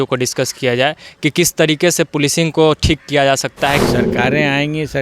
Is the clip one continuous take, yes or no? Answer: no